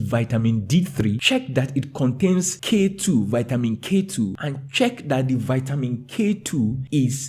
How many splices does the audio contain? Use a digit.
0